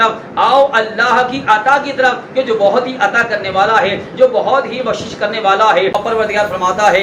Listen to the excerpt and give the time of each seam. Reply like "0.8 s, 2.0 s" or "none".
5.9 s

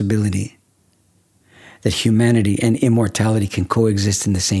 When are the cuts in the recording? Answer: none

